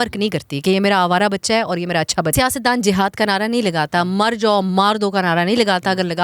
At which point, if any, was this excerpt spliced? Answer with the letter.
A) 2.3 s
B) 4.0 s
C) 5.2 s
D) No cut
A